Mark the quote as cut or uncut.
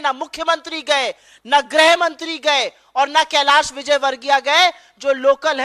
uncut